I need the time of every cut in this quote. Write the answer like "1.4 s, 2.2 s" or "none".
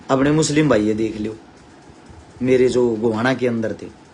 none